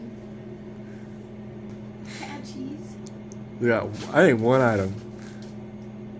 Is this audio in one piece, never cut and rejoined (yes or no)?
no